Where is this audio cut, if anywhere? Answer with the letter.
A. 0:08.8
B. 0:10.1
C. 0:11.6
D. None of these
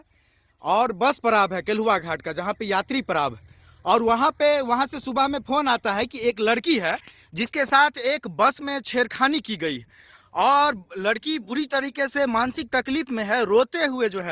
A